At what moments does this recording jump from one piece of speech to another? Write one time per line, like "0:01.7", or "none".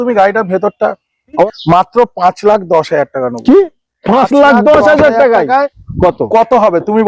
0:01.5
0:05.8